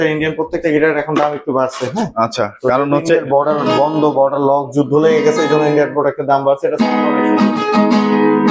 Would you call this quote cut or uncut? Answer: uncut